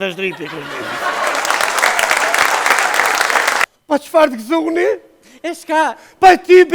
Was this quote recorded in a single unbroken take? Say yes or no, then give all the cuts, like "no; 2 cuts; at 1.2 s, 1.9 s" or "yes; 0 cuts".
no; 1 cut; at 3.6 s